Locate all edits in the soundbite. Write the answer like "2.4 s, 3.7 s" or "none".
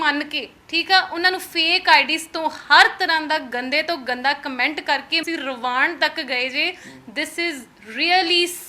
5.2 s